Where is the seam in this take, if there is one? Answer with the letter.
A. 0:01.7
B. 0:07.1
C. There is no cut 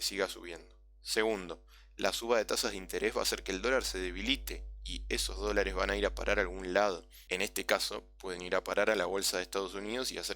B